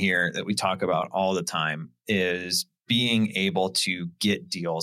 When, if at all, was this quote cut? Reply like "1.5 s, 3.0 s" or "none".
none